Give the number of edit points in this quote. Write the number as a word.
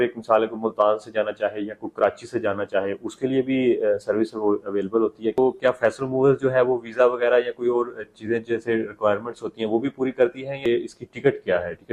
two